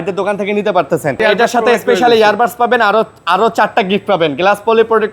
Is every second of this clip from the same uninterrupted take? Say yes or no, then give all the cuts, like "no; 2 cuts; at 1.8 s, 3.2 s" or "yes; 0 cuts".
no; 1 cut; at 1.2 s